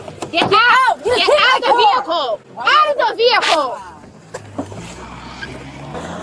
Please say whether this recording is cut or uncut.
uncut